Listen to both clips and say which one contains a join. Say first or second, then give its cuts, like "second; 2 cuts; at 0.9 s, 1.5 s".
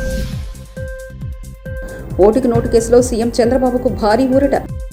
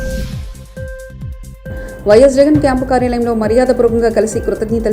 second; 1 cut; at 1.6 s